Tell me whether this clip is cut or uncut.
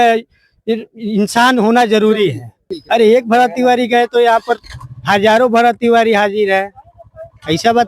cut